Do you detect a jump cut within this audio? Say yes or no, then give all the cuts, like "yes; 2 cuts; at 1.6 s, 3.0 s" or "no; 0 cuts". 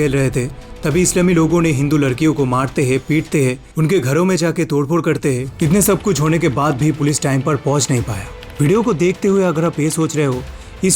yes; 1 cut; at 8.2 s